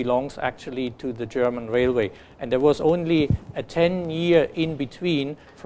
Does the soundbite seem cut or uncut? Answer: cut